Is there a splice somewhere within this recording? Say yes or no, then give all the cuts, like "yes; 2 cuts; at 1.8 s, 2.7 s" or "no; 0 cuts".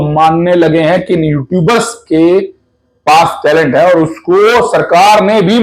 no; 0 cuts